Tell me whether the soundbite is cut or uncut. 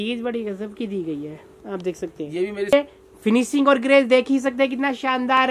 cut